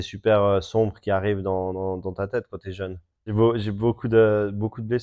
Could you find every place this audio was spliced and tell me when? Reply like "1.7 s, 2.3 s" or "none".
3.3 s